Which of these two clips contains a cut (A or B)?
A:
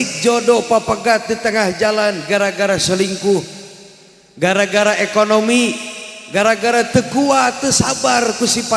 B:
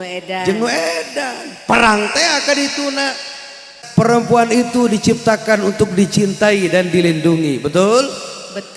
B